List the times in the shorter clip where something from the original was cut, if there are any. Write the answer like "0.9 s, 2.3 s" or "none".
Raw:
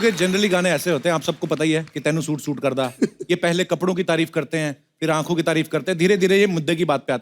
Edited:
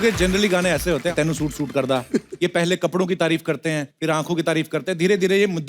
1.1 s, 3.9 s

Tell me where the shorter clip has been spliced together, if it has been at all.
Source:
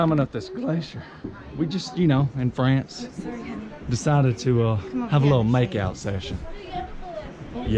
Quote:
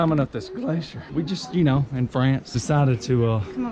1.0 s, 2.5 s

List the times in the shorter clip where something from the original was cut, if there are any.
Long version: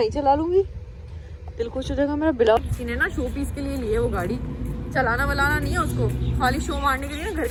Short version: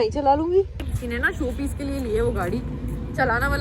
1.0 s

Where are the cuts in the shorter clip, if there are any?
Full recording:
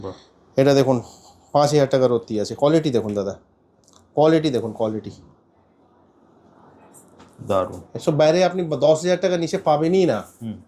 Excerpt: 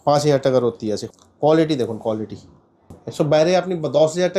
1.0 s, 3.0 s

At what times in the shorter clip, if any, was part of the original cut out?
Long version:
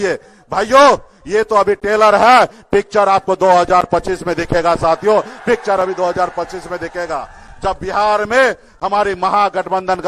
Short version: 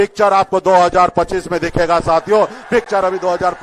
none

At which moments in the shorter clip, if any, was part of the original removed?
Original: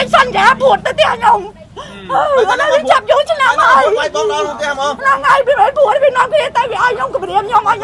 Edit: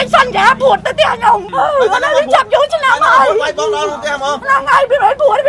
1.5 s

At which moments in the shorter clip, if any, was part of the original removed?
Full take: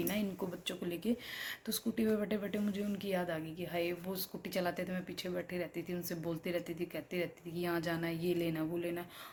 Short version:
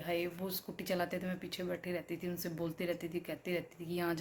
none

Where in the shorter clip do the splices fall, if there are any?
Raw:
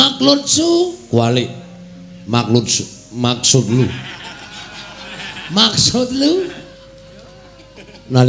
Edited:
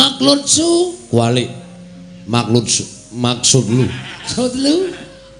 4.3 s

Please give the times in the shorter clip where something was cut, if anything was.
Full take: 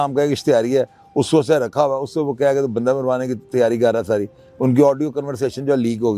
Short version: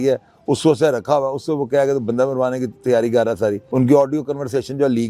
3.6 s

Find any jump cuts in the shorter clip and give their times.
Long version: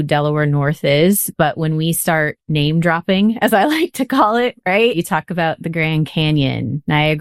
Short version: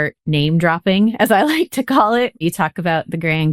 2.4 s

